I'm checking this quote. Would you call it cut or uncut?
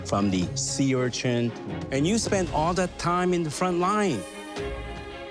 cut